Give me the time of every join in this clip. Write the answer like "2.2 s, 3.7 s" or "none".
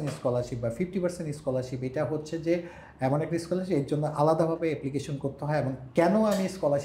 none